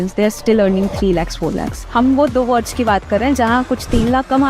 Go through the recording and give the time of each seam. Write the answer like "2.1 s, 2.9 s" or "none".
1.8 s